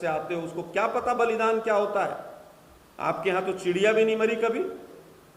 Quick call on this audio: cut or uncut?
uncut